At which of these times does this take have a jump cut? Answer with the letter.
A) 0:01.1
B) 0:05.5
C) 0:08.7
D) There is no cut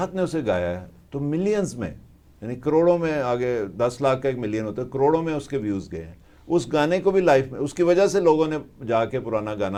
D